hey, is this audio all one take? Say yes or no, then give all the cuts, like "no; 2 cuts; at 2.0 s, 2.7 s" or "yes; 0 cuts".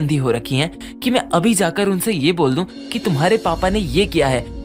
yes; 0 cuts